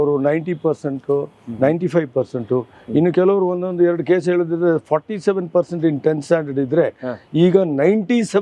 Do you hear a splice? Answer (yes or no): no